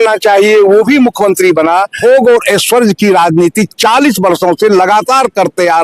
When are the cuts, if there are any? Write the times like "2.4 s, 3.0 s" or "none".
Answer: 1.9 s